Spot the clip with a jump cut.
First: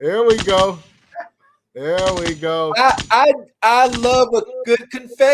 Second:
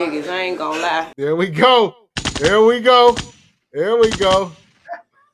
second; 1 cut; at 1.1 s

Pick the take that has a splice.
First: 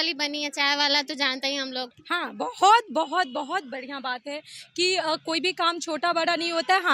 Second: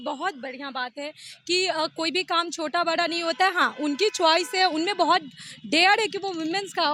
first; 1 cut; at 2.0 s

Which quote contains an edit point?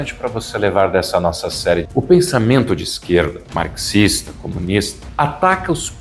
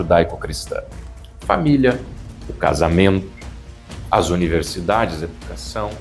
first; 3 cuts; at 1.9 s, 3.4 s, 5.0 s

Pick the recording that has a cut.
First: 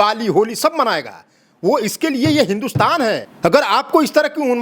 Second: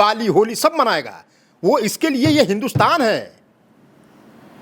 first; 1 cut; at 3.3 s

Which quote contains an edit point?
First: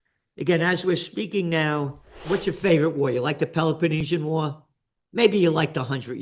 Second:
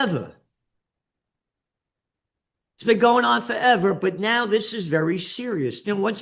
first; 1 cut; at 2.1 s

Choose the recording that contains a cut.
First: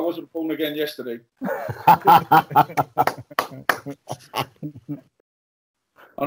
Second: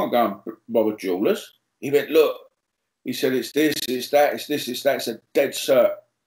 first; 1 cut; at 5.2 s

